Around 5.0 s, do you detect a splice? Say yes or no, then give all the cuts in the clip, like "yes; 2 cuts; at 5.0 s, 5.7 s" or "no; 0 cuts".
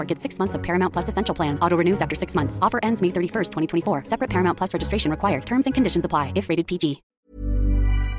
no; 1 cut; at 7.1 s